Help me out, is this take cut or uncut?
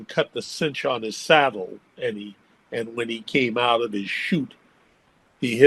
uncut